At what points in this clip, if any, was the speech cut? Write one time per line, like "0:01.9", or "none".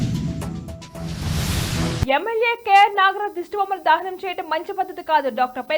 0:02.0